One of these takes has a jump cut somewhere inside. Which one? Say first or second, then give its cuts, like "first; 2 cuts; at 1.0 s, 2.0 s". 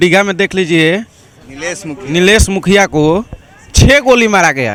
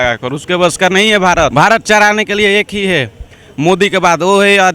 second; 1 cut; at 1.5 s